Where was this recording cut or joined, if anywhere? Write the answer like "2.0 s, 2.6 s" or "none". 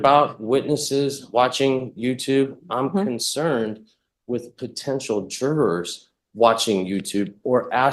none